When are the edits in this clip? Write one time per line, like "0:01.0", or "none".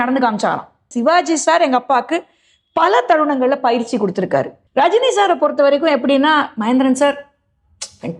0:00.8
0:04.6